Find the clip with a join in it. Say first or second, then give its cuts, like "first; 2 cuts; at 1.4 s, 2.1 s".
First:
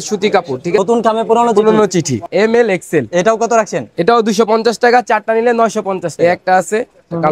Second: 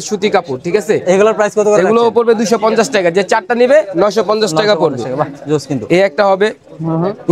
first; 3 cuts; at 0.8 s, 2.3 s, 6.1 s